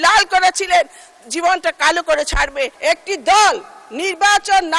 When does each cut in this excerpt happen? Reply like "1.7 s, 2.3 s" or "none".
2.7 s